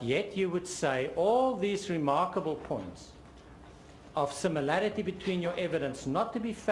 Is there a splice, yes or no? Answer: yes